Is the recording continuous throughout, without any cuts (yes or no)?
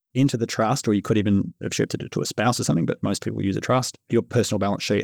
no